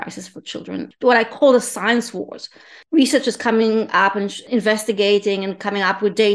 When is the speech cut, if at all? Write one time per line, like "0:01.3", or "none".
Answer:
0:00.9
0:03.1
0:04.4